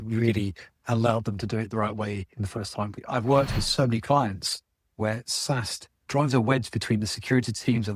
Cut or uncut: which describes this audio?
cut